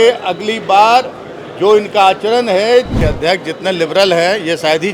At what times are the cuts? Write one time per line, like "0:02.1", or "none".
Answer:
0:03.0